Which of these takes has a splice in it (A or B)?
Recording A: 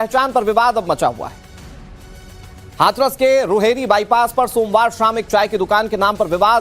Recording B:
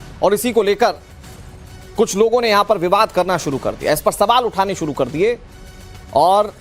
A